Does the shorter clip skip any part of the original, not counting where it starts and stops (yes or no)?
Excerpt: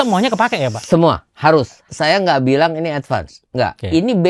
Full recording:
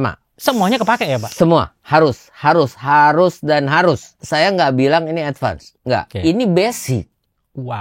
yes